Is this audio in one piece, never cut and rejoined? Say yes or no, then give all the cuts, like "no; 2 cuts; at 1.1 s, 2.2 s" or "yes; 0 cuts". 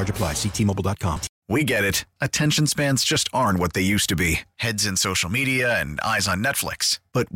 no; 1 cut; at 1.3 s